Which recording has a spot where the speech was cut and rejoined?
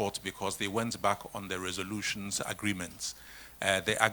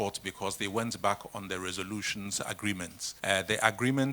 second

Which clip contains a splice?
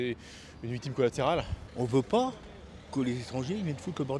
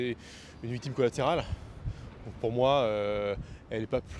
first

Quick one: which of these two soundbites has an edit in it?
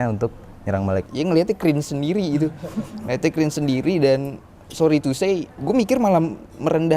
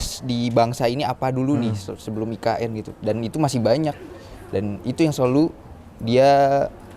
first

